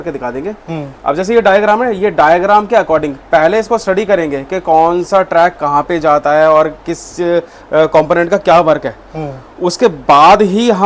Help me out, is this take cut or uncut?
uncut